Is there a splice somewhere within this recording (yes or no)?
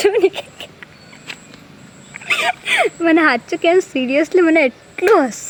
no